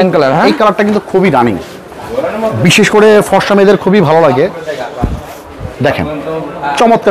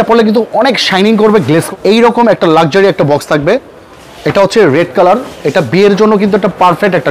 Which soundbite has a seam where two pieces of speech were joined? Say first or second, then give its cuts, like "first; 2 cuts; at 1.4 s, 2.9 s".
second; 1 cut; at 1.7 s